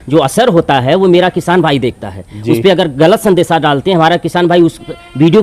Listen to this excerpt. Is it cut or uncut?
uncut